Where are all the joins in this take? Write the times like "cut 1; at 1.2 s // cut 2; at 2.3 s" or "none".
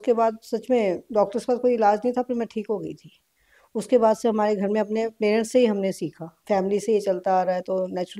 cut 1; at 6.4 s